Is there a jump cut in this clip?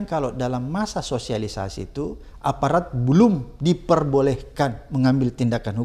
no; 0 cuts

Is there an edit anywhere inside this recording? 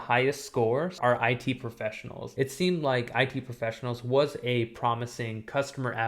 yes; 2 cuts; at 1.0 s, 2.3 s

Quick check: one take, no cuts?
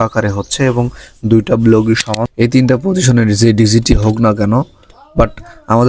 no; 1 cut; at 2.2 s

